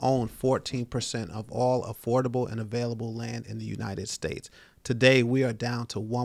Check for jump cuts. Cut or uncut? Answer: uncut